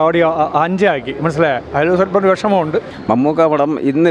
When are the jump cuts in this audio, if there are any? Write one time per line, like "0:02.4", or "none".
0:02.9